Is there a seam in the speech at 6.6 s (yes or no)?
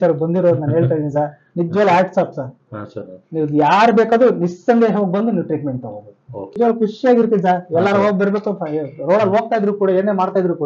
yes